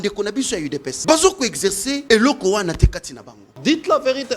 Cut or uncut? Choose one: cut